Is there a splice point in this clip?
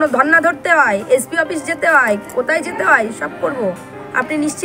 no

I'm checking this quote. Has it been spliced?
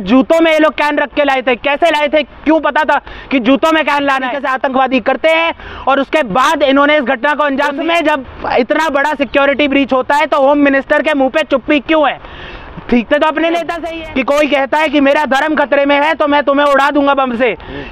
yes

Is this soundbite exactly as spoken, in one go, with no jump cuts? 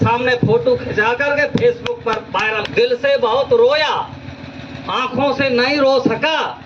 no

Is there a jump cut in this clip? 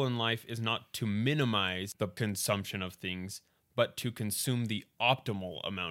no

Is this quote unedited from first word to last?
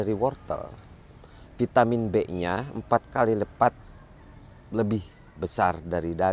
yes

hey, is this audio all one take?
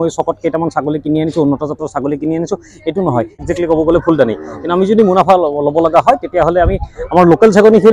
no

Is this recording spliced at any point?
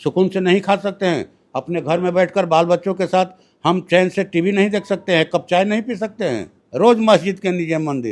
yes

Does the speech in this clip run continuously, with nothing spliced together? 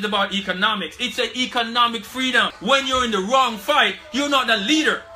no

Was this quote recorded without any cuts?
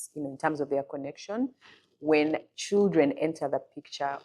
no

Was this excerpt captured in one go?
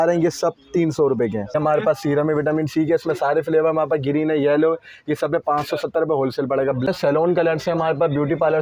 no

